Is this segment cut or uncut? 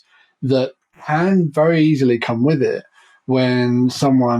uncut